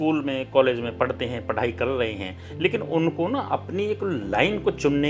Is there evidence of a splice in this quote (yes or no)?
no